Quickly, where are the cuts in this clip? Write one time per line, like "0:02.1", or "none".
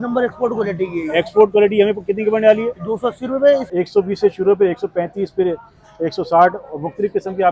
0:03.7